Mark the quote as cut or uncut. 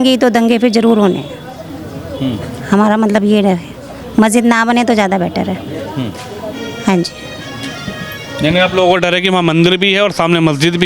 uncut